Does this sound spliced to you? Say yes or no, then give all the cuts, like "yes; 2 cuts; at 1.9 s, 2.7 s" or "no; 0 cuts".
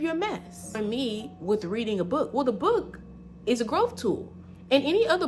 yes; 1 cut; at 1.0 s